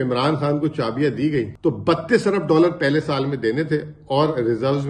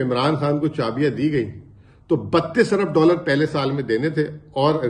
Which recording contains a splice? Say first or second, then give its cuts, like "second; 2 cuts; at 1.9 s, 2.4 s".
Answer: first; 1 cut; at 1.5 s